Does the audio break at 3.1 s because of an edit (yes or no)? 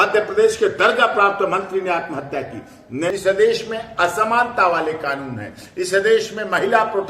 yes